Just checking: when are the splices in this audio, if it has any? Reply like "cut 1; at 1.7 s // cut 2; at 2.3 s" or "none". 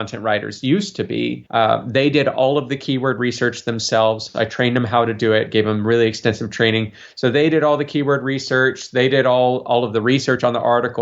cut 1; at 1.4 s